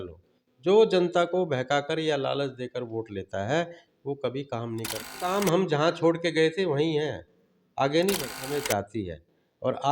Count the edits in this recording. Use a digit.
2